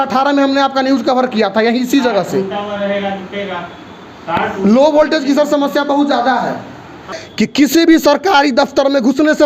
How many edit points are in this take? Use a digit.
1